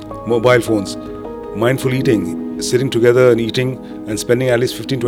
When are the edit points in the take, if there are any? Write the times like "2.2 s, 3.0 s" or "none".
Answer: none